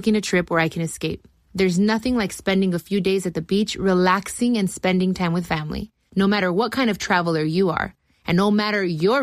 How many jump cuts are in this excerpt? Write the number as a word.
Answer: zero